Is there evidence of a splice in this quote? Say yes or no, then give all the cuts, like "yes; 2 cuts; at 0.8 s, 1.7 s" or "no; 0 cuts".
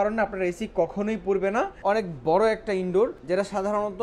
yes; 2 cuts; at 1.7 s, 3.2 s